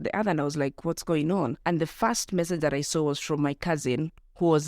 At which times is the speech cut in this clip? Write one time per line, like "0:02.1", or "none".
0:01.6